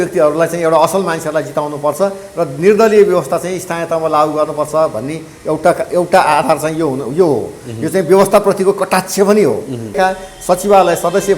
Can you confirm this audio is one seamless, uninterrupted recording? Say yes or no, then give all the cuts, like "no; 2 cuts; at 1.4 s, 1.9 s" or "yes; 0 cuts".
no; 1 cut; at 10.0 s